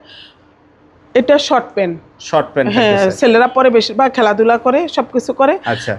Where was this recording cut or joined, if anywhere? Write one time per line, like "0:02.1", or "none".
none

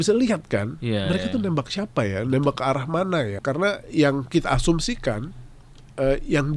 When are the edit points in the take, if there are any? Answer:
0:03.4

